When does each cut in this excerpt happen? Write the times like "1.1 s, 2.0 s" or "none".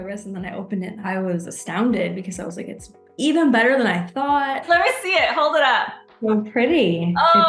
1.0 s, 4.6 s